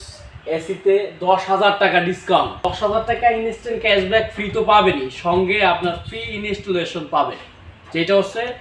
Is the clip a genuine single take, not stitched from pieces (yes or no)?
no